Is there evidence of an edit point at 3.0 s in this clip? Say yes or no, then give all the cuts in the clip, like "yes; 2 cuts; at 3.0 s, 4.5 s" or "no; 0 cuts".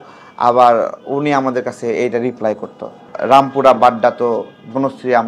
yes; 1 cut; at 3.0 s